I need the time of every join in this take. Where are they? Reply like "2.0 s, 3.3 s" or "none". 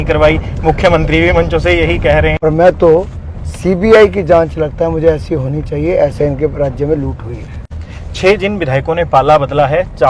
2.4 s